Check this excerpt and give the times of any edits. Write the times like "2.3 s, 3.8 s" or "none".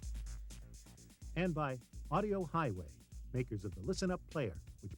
1.3 s